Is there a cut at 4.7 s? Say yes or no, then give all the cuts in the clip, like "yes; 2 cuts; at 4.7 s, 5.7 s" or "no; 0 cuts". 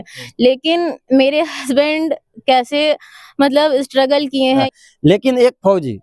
yes; 1 cut; at 4.7 s